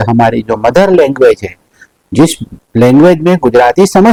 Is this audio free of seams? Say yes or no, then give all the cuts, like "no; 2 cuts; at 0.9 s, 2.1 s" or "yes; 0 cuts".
yes; 0 cuts